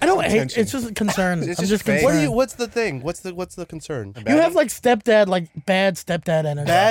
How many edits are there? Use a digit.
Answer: 1